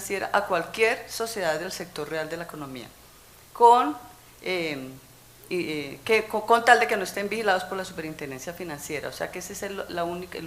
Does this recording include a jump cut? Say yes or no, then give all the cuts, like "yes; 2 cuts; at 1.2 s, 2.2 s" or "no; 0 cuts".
yes; 1 cut; at 9.5 s